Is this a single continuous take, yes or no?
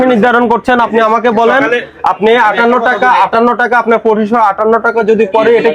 yes